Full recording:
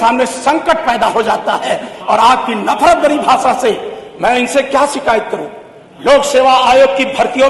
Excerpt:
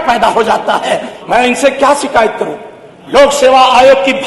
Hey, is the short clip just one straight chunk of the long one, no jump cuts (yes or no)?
no